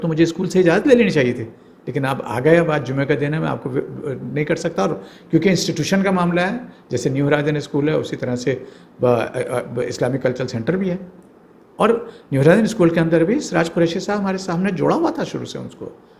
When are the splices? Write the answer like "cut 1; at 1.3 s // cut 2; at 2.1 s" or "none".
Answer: none